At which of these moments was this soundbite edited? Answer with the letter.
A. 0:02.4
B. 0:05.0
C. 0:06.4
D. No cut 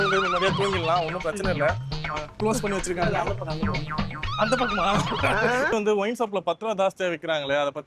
A